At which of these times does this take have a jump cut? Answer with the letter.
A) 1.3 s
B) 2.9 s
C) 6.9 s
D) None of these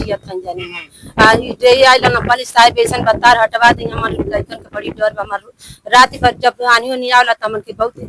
D